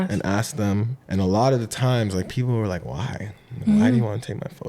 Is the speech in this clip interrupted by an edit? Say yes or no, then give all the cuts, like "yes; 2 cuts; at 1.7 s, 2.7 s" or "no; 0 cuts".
yes; 1 cut; at 1.0 s